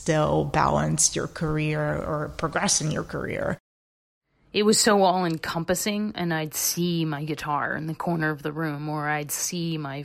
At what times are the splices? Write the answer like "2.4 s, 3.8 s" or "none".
3.9 s